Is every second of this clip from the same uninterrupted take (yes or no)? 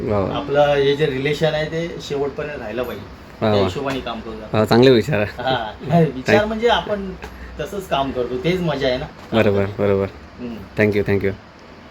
yes